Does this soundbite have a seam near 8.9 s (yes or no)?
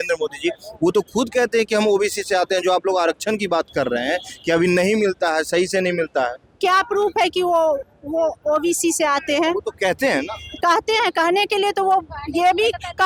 no